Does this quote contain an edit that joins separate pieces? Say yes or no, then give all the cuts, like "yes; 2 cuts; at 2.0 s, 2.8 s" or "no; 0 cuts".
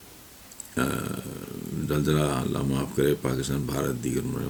no; 0 cuts